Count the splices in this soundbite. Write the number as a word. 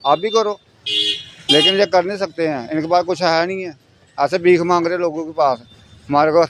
zero